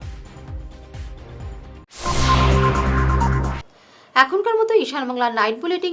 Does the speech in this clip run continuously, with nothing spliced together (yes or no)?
yes